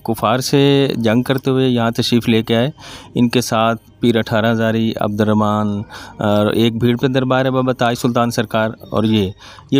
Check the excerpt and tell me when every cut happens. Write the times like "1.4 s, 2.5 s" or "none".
none